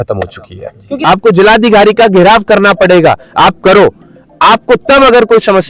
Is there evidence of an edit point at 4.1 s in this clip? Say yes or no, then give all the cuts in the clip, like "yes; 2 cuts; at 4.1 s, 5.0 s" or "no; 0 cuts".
no; 1 cut; at 0.9 s